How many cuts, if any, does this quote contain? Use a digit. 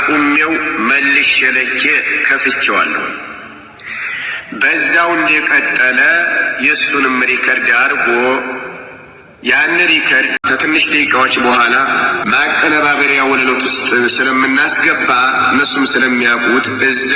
2